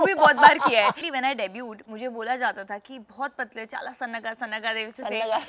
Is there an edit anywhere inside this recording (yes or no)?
yes